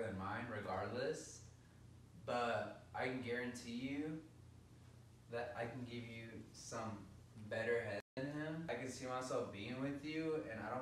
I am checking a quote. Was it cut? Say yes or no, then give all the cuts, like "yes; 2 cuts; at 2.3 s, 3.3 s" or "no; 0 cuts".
yes; 1 cut; at 8.7 s